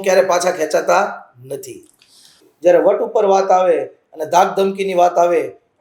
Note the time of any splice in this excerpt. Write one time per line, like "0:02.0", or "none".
0:02.5